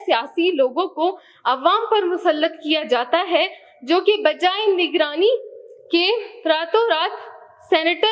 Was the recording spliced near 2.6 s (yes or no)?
no